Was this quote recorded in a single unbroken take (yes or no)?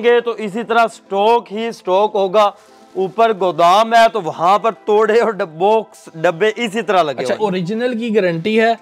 no